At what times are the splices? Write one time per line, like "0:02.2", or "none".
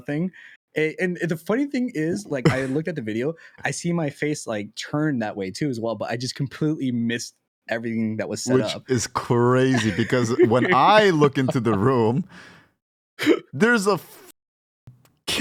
none